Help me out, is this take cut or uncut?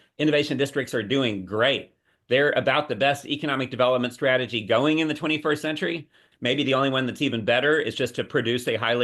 uncut